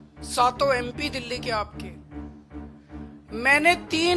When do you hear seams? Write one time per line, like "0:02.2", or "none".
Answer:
0:01.7
0:03.2